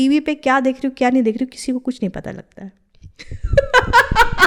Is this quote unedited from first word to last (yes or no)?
yes